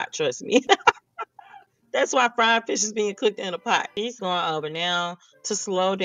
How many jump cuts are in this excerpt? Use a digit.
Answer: 1